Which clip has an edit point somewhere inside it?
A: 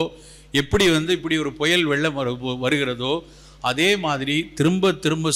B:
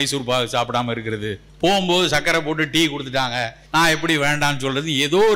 B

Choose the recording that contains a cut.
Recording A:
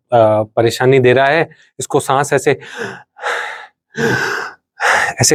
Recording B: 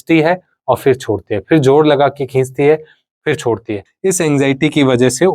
B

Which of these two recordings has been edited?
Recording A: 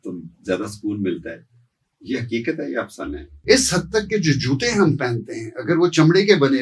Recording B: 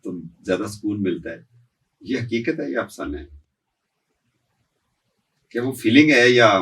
A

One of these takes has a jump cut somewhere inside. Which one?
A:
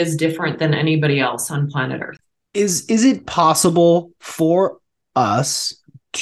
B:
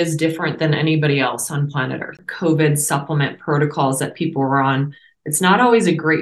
B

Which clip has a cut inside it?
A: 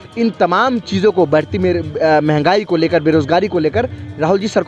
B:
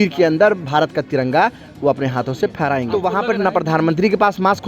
B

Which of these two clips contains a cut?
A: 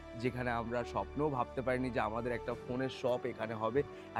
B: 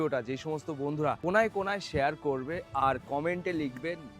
B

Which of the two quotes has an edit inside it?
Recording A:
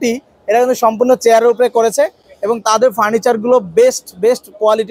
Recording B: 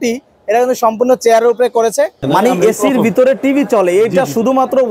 B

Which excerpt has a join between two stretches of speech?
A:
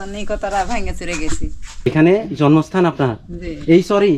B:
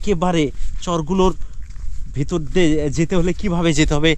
A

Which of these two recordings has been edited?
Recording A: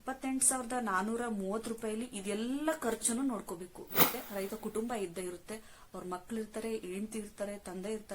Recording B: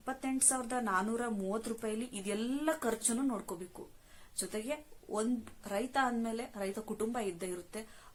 A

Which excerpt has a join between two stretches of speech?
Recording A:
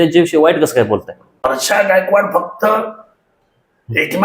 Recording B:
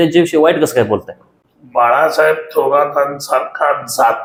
A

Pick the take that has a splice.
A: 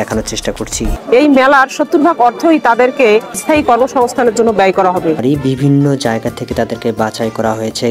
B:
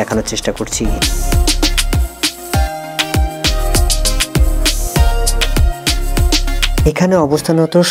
A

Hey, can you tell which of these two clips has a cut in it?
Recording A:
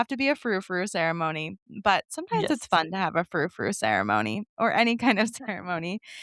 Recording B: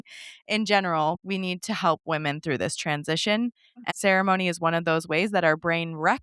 B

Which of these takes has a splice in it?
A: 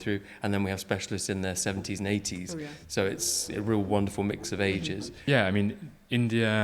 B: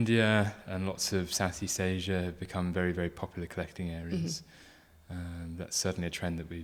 A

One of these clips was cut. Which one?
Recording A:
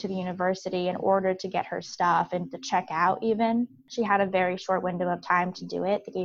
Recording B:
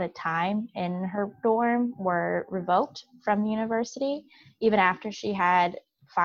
A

